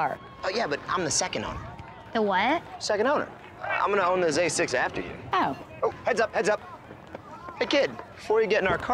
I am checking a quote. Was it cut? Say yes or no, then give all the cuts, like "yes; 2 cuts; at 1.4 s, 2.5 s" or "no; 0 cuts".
no; 0 cuts